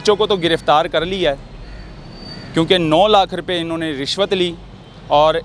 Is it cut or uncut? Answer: uncut